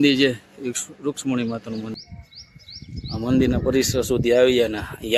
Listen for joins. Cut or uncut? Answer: cut